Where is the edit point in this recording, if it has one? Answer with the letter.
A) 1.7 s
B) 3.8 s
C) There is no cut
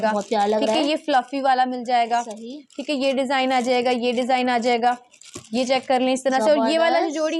C